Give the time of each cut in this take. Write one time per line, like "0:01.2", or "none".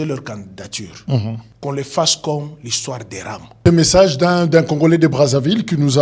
0:01.5
0:03.6